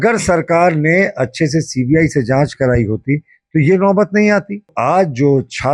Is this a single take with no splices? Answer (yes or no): no